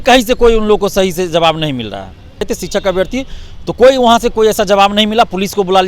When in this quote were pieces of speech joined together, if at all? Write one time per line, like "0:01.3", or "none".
0:02.5